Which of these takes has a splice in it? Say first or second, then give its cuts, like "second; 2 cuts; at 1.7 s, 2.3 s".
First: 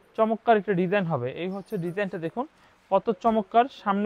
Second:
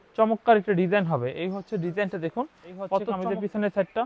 second; 1 cut; at 3.1 s